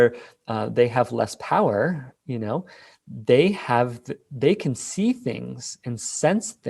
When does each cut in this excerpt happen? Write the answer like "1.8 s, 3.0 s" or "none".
none